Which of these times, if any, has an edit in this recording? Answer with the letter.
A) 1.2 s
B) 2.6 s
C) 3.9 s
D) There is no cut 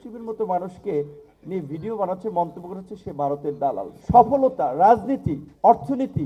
C